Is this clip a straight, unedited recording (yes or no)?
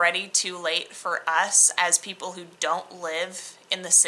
yes